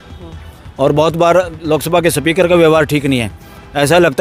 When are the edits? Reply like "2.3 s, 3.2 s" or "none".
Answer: none